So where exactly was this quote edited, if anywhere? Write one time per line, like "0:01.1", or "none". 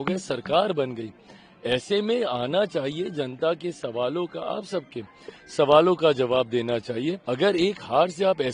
0:07.2